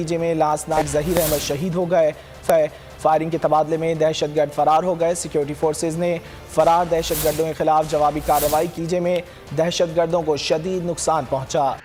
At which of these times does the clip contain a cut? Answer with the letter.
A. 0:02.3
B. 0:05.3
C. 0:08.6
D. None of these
D